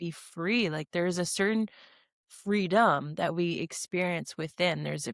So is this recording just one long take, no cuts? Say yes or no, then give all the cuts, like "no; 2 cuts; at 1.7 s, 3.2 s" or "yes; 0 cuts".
yes; 0 cuts